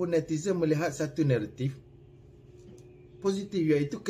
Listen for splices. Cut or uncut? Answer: uncut